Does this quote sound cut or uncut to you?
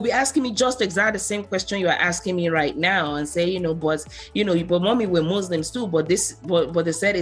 uncut